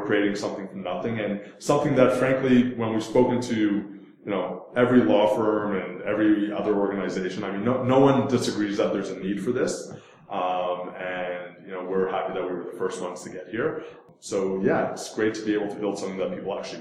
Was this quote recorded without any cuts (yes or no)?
no